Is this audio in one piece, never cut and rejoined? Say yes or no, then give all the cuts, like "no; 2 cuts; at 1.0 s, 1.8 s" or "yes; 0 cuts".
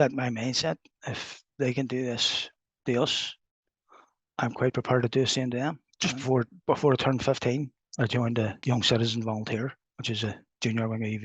no; 2 cuts; at 5.9 s, 8.6 s